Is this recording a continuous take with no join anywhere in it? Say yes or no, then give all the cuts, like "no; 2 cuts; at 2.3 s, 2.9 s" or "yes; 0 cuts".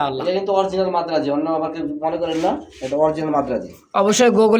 yes; 0 cuts